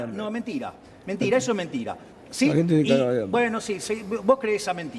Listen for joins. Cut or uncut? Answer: uncut